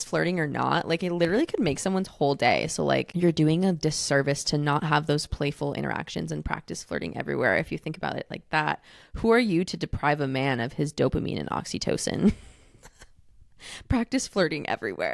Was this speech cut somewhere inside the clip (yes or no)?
yes